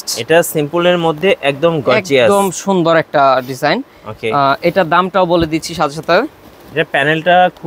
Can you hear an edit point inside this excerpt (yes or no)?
no